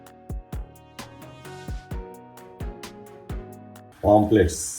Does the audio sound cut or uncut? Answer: cut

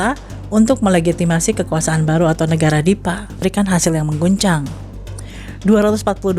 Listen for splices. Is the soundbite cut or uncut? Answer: cut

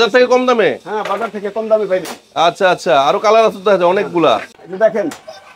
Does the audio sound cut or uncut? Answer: cut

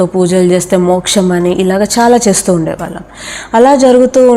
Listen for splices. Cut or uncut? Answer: uncut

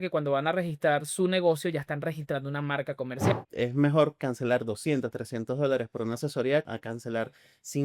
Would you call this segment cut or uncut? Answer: cut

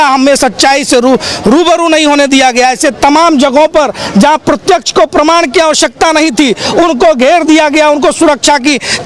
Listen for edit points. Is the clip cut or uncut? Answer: uncut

